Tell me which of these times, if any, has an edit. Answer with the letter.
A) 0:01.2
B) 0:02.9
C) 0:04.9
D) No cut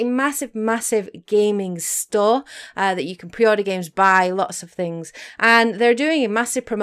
C